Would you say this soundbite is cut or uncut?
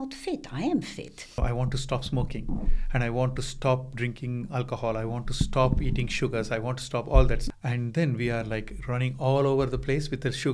cut